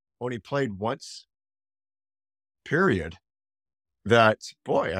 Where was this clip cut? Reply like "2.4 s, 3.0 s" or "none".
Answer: none

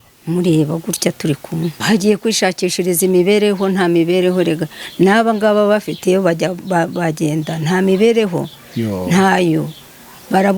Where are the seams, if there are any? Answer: 1.8 s

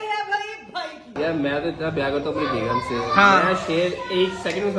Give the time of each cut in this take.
none

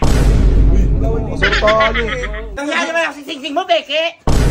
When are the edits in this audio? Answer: 2.6 s

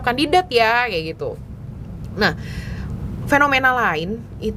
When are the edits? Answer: none

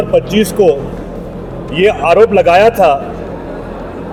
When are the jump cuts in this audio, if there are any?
none

